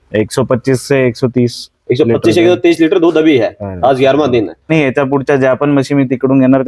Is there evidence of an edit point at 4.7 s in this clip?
yes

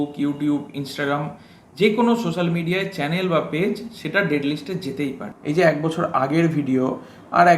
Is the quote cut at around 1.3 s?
no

